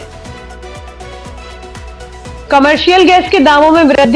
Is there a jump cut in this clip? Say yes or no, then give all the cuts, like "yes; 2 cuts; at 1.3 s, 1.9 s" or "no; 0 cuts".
no; 0 cuts